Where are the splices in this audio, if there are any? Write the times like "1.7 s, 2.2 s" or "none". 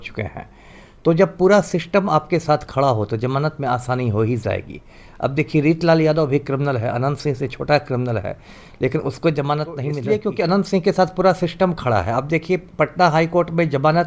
9.9 s